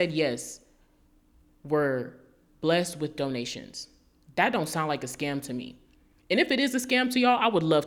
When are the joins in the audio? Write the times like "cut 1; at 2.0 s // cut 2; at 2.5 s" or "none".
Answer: none